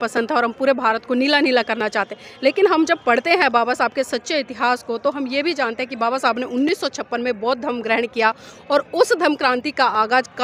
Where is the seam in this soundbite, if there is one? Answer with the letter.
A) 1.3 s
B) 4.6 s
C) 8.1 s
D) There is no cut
D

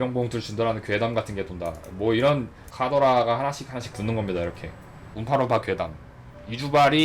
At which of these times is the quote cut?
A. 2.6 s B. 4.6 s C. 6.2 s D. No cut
A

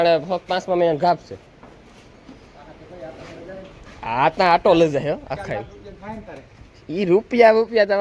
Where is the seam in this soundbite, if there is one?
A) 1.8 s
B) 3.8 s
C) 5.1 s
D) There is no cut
D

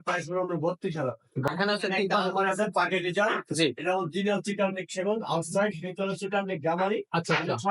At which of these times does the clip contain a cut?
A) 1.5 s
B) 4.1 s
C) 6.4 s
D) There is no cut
A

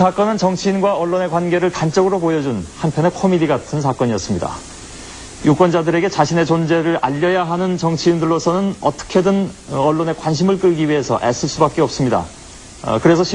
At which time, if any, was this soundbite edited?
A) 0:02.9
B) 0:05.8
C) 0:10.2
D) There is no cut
A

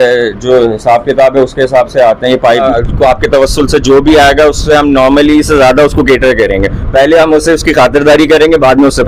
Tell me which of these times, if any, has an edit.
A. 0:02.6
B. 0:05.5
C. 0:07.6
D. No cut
A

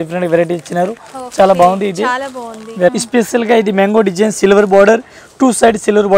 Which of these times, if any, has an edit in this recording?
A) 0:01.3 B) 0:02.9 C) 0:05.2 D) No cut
B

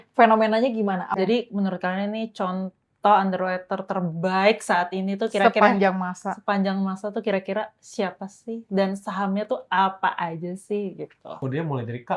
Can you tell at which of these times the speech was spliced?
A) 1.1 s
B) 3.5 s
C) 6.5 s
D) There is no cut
A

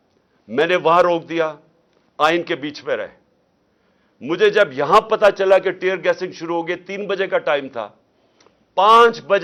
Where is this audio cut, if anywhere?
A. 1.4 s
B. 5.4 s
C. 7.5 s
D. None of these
D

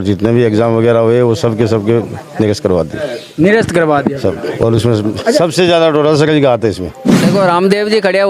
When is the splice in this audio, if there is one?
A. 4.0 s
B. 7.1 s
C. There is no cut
B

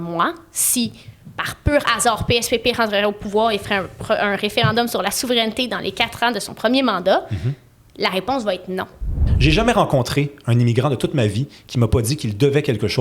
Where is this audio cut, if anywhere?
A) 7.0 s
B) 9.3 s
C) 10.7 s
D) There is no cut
B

